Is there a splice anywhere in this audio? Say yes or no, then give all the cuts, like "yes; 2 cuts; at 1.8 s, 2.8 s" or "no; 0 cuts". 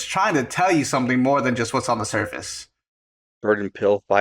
yes; 1 cut; at 3.2 s